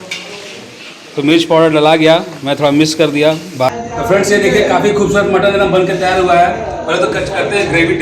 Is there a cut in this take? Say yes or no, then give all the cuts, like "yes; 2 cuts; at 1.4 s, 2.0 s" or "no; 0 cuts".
yes; 1 cut; at 3.7 s